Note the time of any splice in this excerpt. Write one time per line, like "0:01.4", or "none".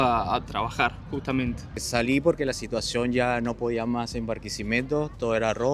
0:01.8